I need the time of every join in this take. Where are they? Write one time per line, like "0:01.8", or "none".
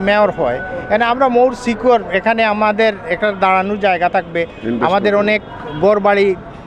none